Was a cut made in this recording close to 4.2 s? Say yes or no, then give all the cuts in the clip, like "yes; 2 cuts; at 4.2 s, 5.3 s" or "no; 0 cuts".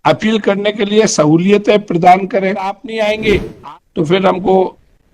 no; 1 cut; at 2.8 s